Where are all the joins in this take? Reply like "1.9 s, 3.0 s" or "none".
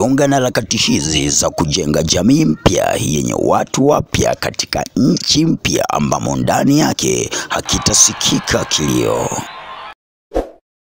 none